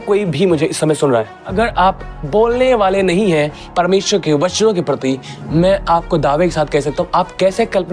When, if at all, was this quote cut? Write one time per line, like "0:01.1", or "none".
0:01.4